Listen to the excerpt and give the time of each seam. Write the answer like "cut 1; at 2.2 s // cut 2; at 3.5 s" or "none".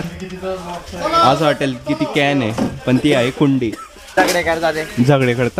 cut 1; at 4.1 s